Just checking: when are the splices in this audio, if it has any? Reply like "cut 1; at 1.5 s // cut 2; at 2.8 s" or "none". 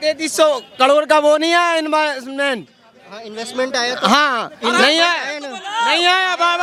none